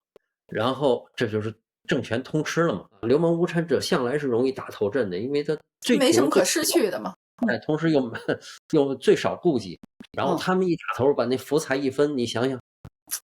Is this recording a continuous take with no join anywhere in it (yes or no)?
no